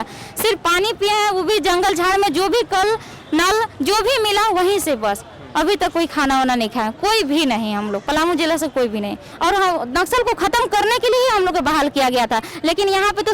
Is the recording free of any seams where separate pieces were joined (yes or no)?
no